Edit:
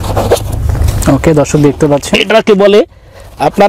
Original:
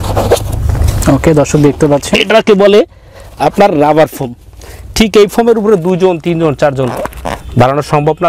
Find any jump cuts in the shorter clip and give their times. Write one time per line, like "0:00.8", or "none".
none

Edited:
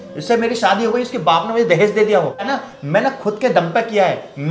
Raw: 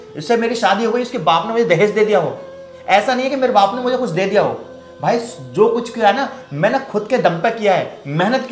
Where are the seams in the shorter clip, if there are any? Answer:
0:02.6

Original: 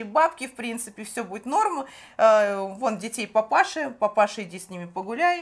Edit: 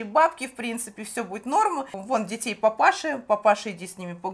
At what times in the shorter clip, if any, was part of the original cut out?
0:02.0

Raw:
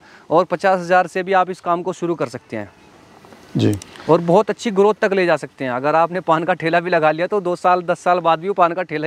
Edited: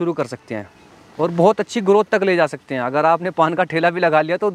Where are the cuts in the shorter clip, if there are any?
0:01.0

